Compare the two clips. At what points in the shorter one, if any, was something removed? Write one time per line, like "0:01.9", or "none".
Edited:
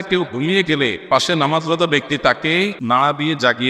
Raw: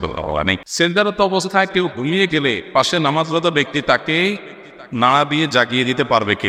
0:02.8